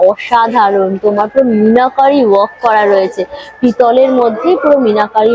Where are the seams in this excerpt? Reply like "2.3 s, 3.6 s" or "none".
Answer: none

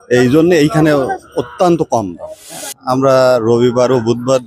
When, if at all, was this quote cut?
2.6 s

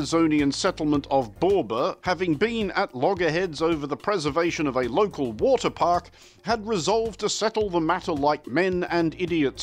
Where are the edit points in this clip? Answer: 2.0 s

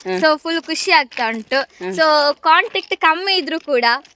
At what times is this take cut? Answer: none

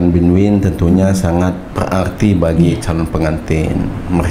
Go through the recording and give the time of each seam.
1.7 s

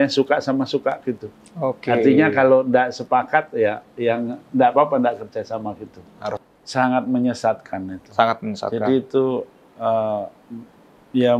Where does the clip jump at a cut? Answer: 6.3 s

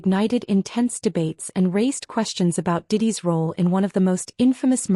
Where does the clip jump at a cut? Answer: none

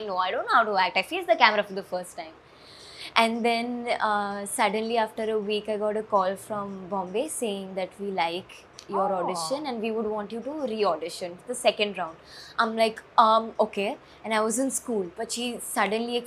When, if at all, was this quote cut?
none

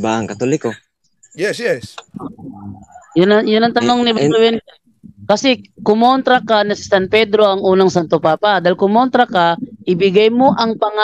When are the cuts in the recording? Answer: none

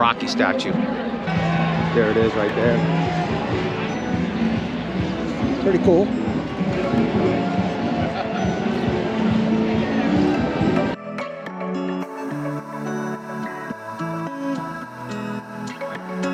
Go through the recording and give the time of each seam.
none

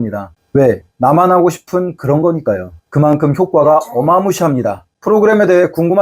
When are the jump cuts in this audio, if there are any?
none

